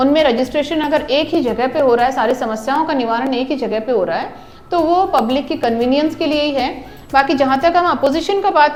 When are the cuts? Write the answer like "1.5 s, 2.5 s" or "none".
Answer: none